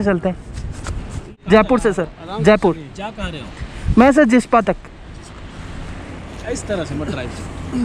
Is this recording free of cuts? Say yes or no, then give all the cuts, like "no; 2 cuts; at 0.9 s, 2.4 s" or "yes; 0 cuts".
no; 1 cut; at 1.3 s